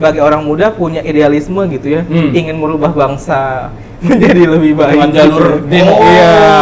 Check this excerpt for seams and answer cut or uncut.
uncut